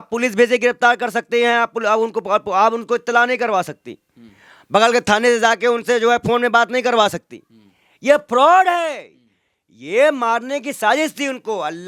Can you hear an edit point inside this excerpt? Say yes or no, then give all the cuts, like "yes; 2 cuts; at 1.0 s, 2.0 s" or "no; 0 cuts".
no; 0 cuts